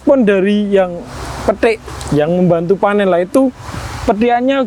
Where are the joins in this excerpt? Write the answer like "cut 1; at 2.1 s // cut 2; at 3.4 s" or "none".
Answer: none